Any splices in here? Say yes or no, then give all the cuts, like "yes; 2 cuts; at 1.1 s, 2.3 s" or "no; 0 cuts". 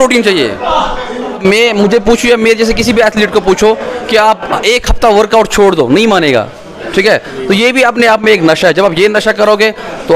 yes; 1 cut; at 1.4 s